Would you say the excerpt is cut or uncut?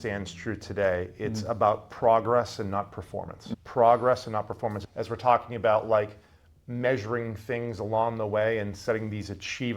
cut